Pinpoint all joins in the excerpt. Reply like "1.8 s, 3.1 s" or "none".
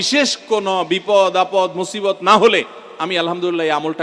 none